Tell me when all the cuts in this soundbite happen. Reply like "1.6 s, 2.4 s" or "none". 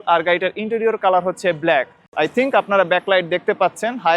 2.0 s